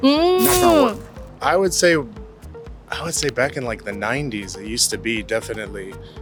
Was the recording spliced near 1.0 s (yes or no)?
no